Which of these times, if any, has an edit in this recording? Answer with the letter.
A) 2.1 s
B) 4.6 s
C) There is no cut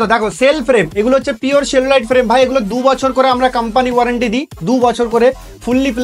C